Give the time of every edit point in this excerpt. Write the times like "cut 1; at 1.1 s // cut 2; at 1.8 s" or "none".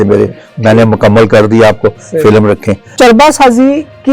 cut 1; at 2.9 s

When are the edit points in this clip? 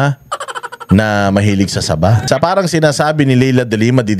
cut 1; at 2.2 s

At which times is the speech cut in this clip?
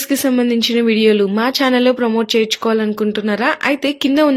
none

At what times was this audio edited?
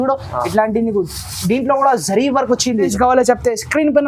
cut 1; at 2.9 s

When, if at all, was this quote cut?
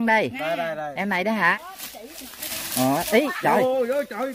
cut 1; at 1.5 s

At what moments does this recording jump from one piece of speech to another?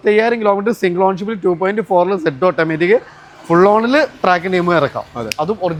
none

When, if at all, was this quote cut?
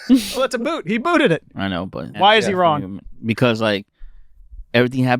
cut 1; at 2.1 s

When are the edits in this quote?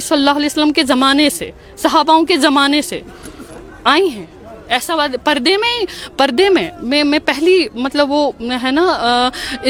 none

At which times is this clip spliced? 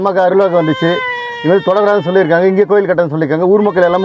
none

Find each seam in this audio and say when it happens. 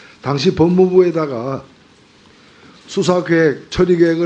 none

